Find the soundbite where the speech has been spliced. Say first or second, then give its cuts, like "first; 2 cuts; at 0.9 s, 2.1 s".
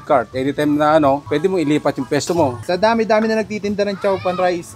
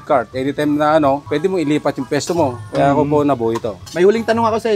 first; 1 cut; at 2.6 s